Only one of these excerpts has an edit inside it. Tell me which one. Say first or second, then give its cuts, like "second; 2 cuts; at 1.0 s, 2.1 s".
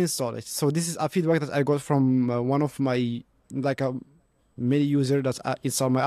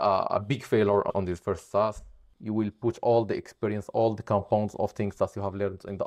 second; 1 cut; at 2.4 s